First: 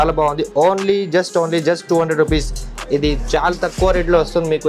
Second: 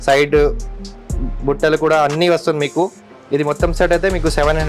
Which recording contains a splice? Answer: first; 1 cut; at 2.7 s

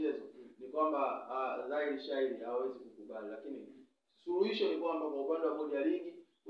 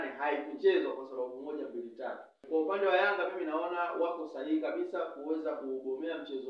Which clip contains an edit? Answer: second; 1 cut; at 2.3 s

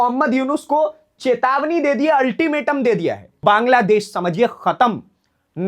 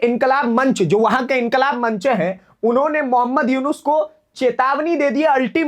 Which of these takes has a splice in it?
first; 1 cut; at 3.4 s

